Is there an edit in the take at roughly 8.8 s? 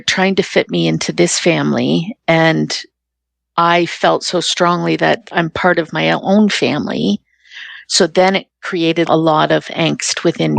yes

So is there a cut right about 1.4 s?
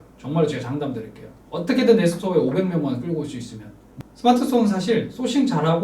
no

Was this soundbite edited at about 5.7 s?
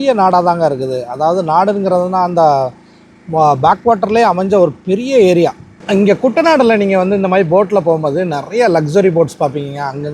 yes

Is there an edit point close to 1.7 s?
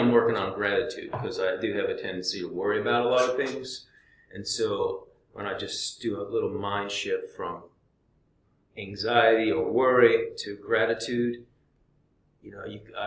no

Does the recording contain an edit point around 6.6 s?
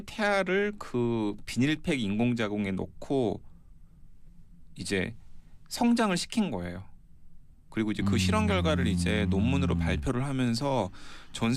yes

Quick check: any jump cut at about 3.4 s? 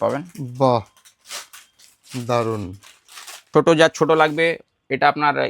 yes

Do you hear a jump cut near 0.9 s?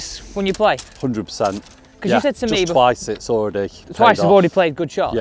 no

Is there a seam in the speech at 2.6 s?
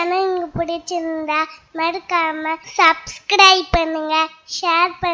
yes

